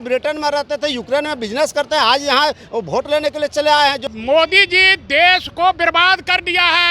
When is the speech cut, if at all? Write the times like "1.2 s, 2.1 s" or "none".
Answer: 4.1 s